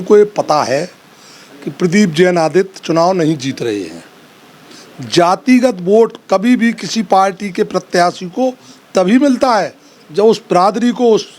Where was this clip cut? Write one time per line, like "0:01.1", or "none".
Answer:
none